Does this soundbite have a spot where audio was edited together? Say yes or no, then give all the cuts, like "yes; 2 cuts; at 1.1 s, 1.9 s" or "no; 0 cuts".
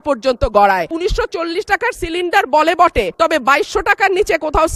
yes; 2 cuts; at 0.9 s, 3.1 s